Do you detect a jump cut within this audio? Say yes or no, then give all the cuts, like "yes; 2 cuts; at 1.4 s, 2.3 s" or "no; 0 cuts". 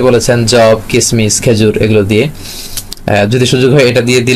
no; 0 cuts